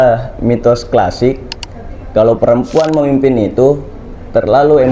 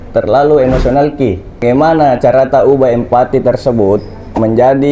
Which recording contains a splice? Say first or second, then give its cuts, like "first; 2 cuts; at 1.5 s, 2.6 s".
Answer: second; 1 cut; at 1.6 s